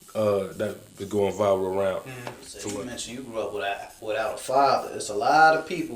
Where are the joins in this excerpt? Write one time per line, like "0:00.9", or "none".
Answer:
0:02.6